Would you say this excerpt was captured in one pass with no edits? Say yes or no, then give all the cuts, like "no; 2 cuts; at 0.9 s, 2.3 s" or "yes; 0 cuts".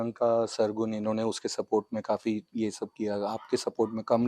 yes; 0 cuts